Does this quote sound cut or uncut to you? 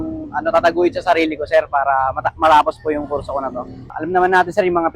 cut